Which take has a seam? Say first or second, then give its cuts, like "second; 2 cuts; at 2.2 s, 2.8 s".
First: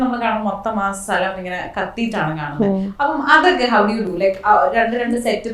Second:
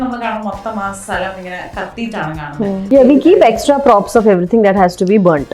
second; 1 cut; at 2.9 s